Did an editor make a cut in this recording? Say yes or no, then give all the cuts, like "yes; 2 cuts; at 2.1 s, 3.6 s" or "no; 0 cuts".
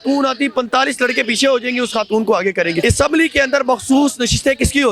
yes; 1 cut; at 2.8 s